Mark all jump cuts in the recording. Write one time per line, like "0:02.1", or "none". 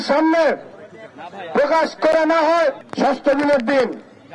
0:02.8